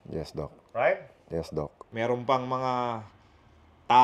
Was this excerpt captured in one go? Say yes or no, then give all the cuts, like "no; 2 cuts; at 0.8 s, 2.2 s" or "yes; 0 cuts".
no; 1 cut; at 1.8 s